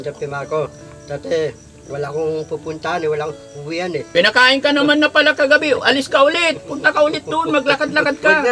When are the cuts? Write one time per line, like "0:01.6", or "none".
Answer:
0:04.1